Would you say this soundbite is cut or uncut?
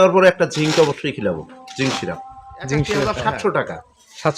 cut